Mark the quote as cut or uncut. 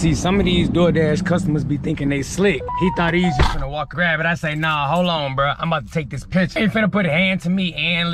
cut